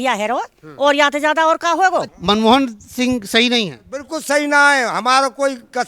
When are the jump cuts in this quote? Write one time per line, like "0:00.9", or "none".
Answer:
0:02.1